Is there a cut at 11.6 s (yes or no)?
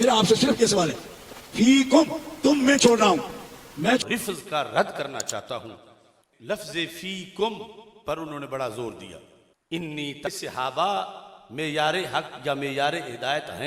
no